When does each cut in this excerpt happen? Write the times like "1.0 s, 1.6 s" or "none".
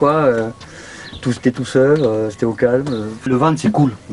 none